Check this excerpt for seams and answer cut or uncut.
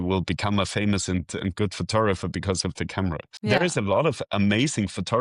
uncut